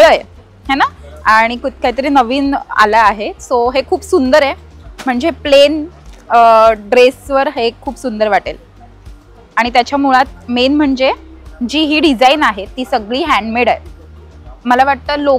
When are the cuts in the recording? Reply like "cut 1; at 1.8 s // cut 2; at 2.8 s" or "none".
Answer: none